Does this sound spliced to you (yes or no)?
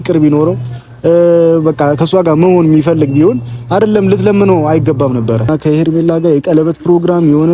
yes